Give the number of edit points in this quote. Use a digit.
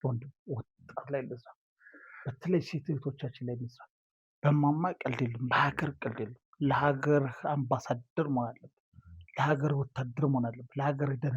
1